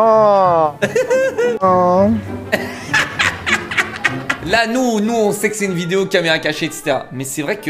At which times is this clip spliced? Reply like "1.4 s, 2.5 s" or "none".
1.6 s, 4.4 s